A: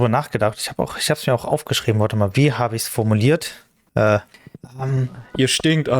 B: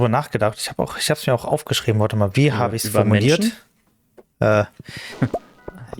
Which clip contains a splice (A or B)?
A